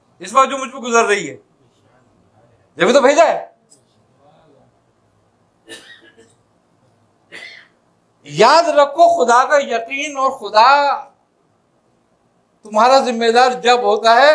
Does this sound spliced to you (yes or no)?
no